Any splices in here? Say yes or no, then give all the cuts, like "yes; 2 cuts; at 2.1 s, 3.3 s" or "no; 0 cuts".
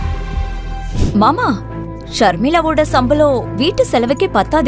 yes; 1 cut; at 1.0 s